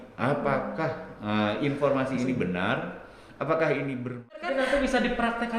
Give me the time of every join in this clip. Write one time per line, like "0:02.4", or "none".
0:04.3